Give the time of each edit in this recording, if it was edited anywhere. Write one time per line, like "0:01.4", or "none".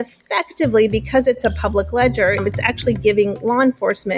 0:02.4